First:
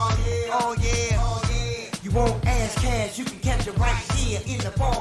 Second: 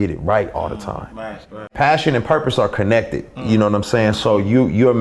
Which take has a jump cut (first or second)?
second